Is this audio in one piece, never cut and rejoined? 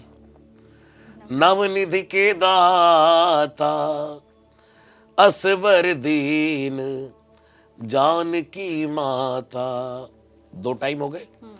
yes; 0 cuts

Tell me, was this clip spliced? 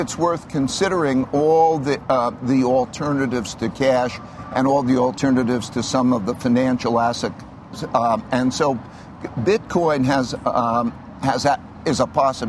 no; 0 cuts

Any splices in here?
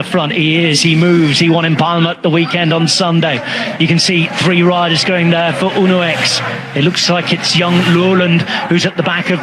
no; 0 cuts

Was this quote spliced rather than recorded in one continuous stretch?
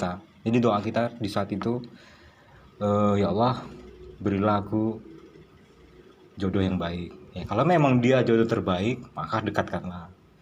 no; 0 cuts

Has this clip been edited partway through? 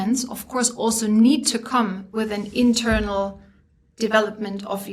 no; 0 cuts

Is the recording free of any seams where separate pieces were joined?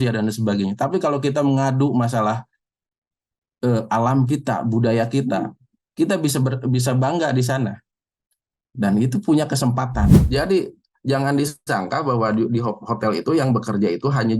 no; 1 cut; at 10.2 s

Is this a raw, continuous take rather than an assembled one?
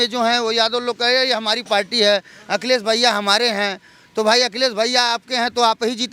yes; 0 cuts

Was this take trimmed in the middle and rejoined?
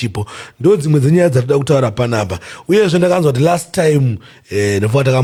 no; 0 cuts

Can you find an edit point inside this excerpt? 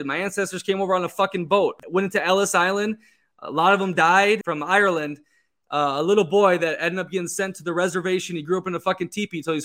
yes; 2 cuts; at 1.8 s, 4.4 s

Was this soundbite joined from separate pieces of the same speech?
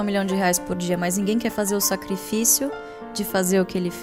no; 0 cuts

